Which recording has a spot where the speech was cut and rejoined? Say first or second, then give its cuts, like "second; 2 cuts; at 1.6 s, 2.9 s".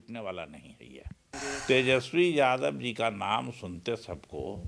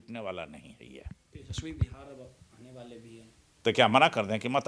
first; 1 cut; at 1.3 s